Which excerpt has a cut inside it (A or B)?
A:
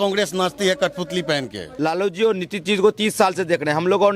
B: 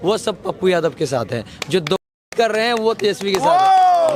A